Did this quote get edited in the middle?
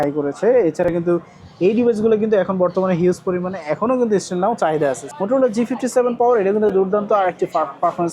yes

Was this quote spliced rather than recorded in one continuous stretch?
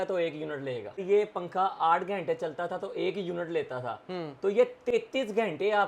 yes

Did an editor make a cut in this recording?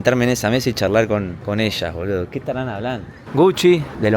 yes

